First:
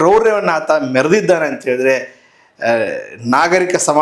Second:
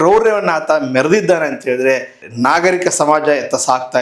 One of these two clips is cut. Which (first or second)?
second